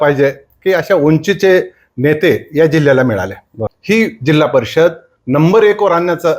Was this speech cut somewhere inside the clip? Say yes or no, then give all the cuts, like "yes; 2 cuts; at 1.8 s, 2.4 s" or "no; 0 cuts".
yes; 1 cut; at 3.7 s